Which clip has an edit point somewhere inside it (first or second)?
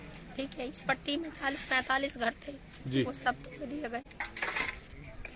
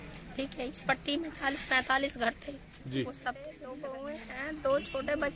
second